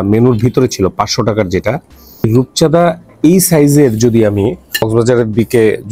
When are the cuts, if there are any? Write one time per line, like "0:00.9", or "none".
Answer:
0:02.2
0:04.9

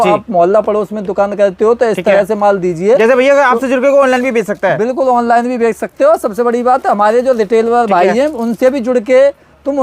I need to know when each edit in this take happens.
none

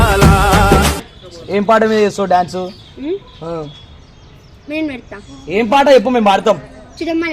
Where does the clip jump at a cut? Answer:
0:01.0

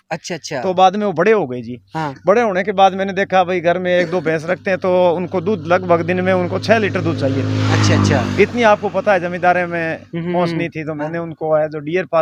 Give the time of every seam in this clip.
none

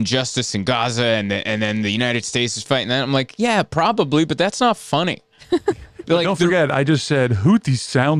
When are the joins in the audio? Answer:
none

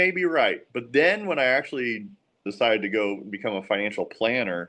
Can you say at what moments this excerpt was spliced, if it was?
0:02.4

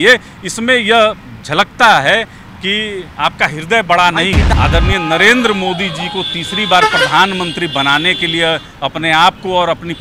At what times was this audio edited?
0:04.5

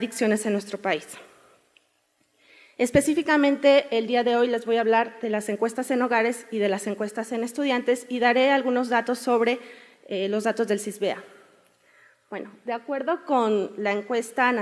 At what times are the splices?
0:04.6

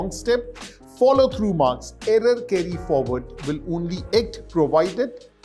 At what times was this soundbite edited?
none

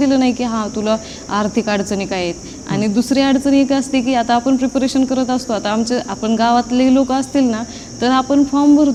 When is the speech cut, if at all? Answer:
none

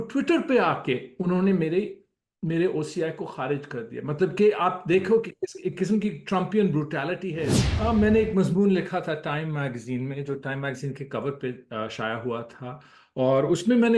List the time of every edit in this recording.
0:07.6

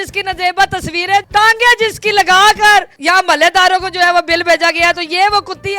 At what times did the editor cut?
0:01.3

